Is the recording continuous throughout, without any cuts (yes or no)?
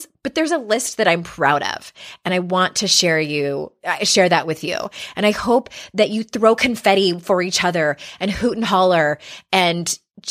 yes